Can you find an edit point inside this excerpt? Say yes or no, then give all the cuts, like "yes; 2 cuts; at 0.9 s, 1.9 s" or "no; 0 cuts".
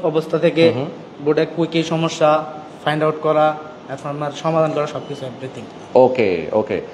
no; 0 cuts